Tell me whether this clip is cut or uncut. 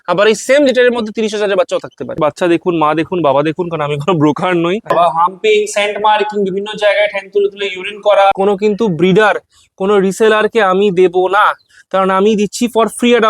cut